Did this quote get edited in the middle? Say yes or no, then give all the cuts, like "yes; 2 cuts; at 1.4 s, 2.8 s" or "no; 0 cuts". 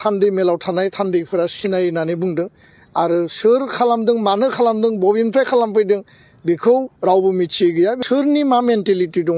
yes; 1 cut; at 8.0 s